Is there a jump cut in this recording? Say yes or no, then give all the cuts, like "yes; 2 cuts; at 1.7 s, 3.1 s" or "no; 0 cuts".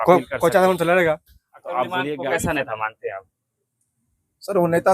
yes; 1 cut; at 2.1 s